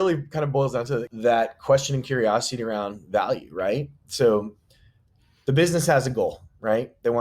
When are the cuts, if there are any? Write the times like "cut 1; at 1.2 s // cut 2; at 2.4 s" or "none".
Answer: cut 1; at 1.1 s